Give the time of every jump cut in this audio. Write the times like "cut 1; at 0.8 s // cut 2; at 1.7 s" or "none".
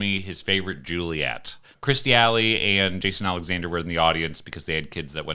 cut 1; at 1.7 s